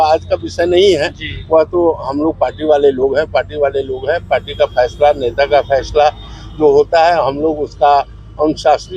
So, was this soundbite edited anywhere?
no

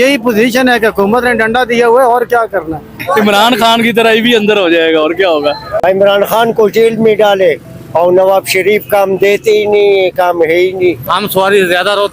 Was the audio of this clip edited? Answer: yes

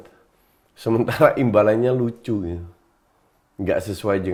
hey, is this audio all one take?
yes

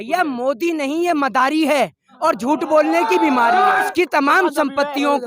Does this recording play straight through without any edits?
no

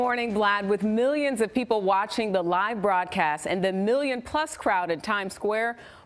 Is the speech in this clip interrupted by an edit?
yes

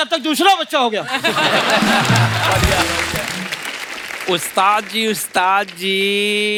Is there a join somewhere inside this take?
no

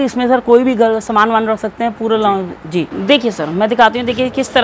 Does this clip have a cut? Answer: yes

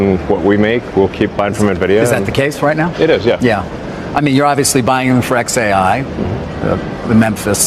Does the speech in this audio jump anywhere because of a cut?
no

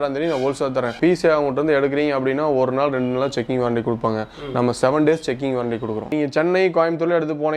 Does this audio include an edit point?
yes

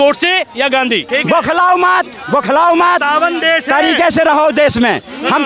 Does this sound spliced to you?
yes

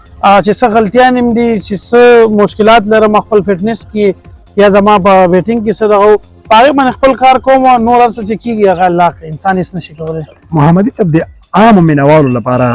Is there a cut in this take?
no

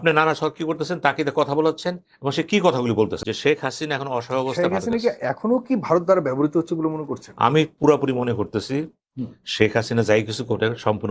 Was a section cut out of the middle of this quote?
yes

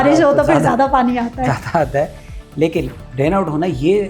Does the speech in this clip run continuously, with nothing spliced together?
no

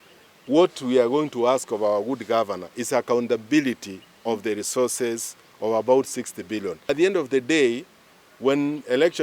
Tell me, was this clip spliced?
yes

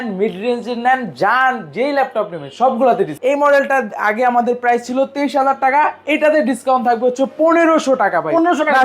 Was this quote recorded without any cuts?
no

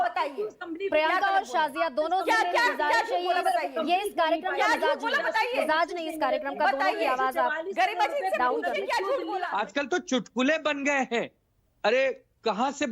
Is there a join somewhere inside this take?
yes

